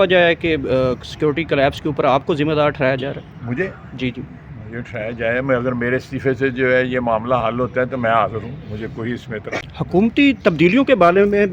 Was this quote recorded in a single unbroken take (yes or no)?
no